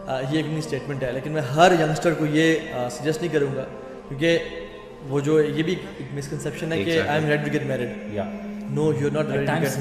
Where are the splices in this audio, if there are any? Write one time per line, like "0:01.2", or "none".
none